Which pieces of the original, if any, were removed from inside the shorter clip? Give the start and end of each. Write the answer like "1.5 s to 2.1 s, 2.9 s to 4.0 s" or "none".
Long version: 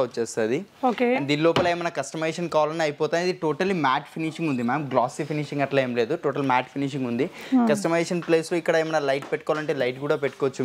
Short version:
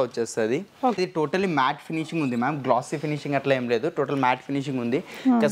1.0 s to 3.2 s